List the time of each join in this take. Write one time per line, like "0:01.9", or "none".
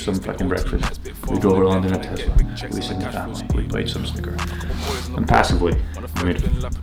none